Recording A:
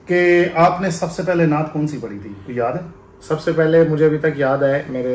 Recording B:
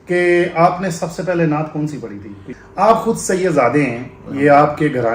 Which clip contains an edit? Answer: B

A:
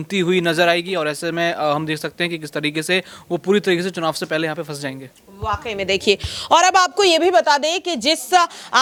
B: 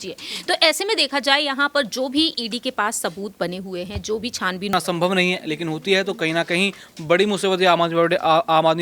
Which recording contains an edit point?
B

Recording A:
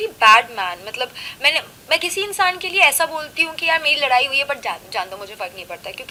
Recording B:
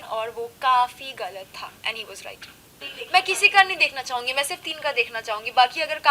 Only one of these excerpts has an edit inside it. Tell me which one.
B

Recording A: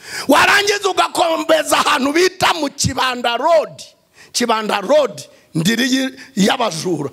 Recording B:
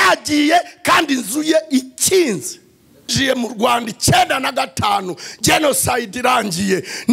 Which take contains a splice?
B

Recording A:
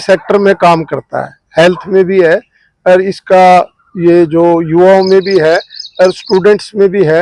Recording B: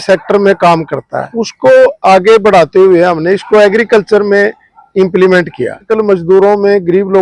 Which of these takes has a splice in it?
B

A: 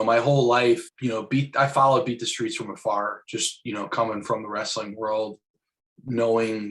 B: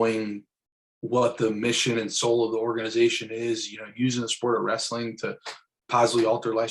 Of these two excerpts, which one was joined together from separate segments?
A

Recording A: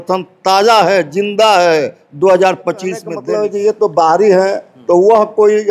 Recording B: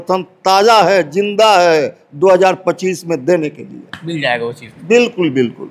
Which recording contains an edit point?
A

